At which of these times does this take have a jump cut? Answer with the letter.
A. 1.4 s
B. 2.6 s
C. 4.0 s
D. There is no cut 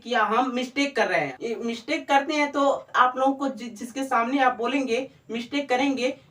A